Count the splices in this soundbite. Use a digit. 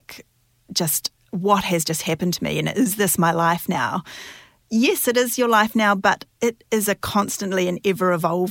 0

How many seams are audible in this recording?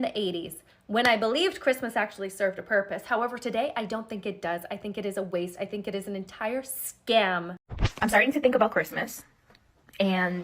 1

